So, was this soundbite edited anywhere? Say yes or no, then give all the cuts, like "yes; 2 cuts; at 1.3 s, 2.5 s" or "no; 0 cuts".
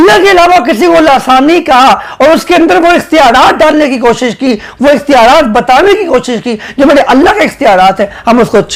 no; 0 cuts